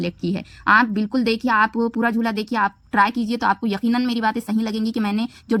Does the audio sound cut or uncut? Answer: uncut